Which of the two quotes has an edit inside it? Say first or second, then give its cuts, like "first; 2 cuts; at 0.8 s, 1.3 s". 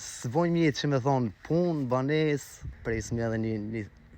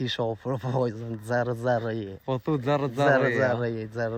first; 1 cut; at 2.7 s